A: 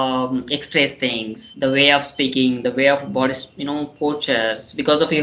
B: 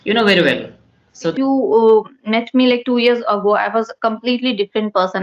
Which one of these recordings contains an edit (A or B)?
B